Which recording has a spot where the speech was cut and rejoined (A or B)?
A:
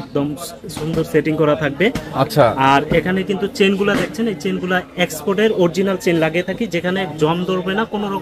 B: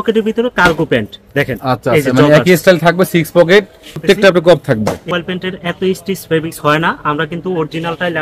B